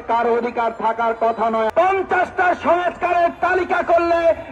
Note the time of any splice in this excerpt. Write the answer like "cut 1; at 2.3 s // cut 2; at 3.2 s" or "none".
cut 1; at 1.7 s